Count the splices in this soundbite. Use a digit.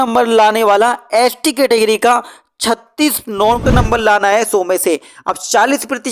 1